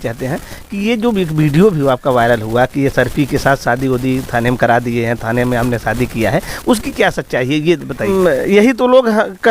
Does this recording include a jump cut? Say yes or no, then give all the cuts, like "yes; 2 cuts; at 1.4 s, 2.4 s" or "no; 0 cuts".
yes; 1 cut; at 8.0 s